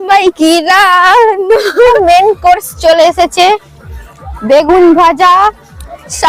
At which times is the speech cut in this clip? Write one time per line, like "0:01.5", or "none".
0:01.9